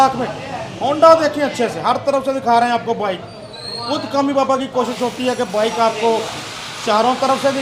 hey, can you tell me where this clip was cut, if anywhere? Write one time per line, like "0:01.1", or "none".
none